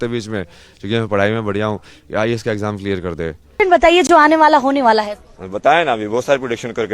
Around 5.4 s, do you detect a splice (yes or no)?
no